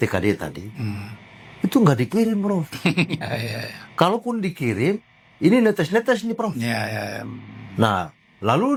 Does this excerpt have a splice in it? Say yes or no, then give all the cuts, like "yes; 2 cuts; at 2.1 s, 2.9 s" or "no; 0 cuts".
no; 0 cuts